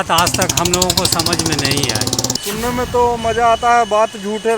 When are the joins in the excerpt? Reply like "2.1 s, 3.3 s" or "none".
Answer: 2.3 s